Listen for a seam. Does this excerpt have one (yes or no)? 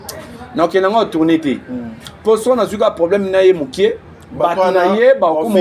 no